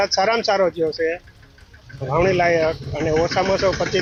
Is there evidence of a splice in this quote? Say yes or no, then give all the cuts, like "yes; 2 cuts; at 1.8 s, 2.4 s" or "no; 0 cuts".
no; 0 cuts